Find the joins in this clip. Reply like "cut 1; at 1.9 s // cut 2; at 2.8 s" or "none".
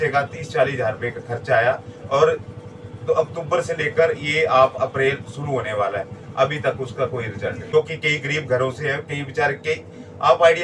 cut 1; at 7.6 s